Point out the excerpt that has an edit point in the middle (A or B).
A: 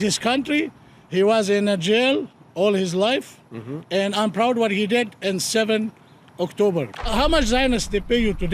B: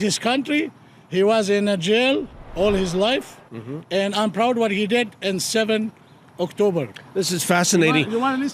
A